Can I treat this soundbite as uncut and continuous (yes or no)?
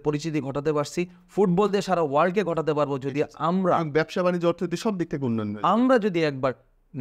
yes